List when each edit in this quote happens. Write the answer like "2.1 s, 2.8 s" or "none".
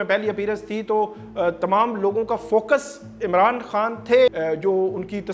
4.3 s